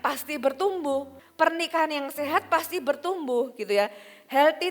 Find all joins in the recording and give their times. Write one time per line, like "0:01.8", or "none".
0:01.2